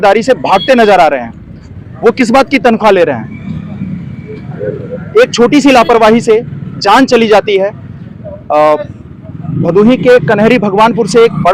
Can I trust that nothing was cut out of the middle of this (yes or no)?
yes